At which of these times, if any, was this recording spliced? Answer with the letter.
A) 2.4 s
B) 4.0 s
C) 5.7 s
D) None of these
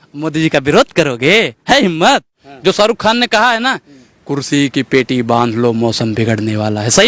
A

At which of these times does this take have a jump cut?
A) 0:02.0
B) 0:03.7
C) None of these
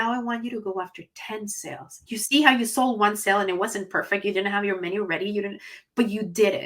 A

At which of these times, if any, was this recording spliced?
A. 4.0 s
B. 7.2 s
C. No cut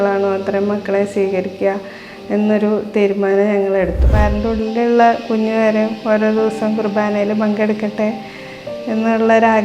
A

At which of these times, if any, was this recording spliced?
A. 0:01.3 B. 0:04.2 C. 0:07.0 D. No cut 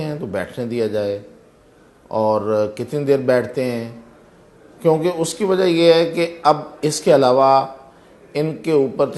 D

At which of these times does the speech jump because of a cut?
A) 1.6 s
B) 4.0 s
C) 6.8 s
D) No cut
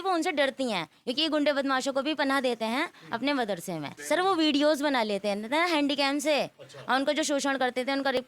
B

